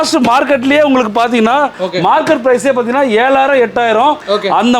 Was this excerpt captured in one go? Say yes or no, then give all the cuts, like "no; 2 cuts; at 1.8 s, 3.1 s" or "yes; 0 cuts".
no; 1 cut; at 1.8 s